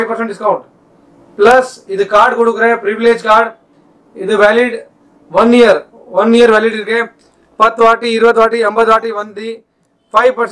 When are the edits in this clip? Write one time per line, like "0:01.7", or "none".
none

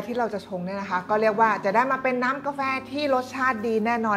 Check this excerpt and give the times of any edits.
none

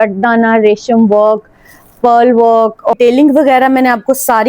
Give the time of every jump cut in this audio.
0:02.9

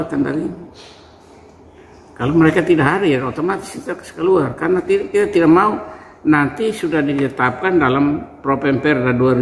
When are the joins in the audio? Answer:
none

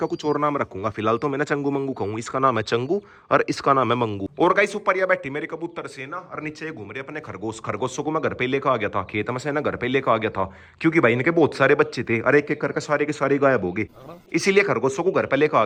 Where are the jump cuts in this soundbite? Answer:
none

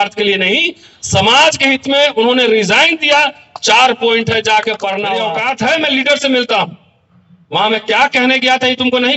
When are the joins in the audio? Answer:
0:05.1

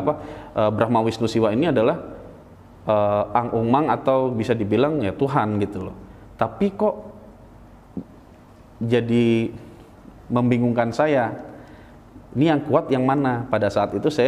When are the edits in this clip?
none

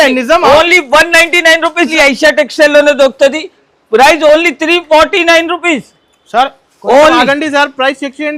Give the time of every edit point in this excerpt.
0:01.9

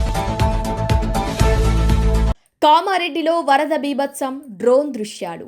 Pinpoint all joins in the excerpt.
0:02.3

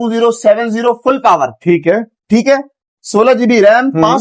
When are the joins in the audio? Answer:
none

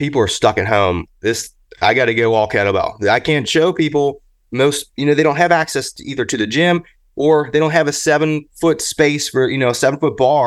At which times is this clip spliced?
none

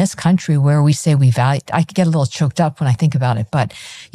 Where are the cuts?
none

